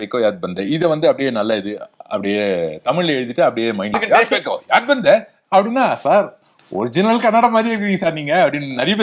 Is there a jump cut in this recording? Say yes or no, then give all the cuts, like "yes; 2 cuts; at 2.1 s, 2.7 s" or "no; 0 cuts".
yes; 1 cut; at 4.0 s